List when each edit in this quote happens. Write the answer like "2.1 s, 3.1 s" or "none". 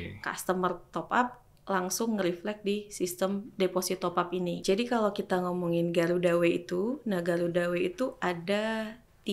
4.6 s